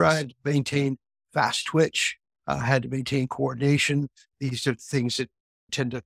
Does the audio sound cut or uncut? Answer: cut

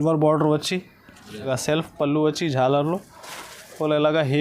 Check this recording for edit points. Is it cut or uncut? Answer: cut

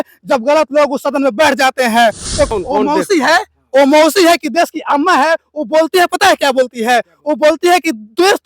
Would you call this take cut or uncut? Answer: cut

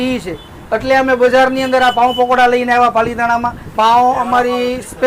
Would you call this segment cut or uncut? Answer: cut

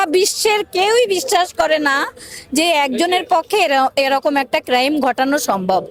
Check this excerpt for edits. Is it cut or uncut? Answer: uncut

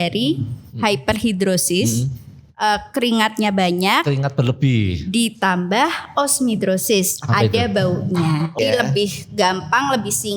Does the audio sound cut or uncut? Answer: cut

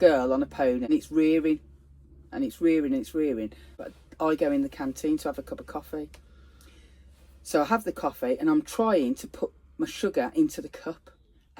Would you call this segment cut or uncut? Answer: cut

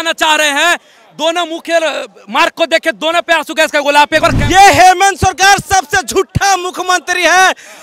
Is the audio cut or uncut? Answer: cut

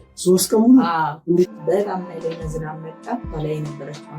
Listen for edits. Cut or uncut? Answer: cut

